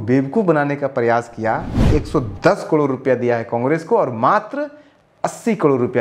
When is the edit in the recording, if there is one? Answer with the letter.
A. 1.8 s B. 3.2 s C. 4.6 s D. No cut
A